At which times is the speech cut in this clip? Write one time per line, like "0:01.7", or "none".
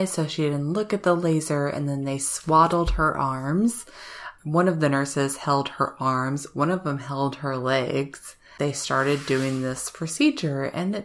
0:04.3
0:08.5